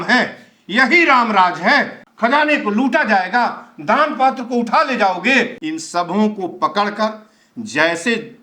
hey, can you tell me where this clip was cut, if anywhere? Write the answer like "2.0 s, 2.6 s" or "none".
2.0 s, 5.6 s